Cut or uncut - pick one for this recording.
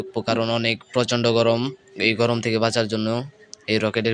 uncut